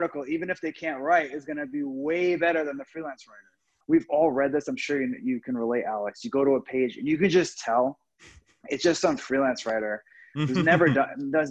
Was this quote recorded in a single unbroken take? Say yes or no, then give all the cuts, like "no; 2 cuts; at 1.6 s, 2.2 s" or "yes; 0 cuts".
no; 1 cut; at 3.7 s